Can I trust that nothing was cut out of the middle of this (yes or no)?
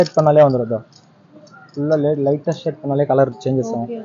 yes